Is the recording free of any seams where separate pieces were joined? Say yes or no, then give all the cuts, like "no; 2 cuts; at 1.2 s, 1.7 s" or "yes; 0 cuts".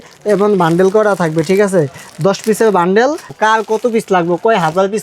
no; 1 cut; at 3.3 s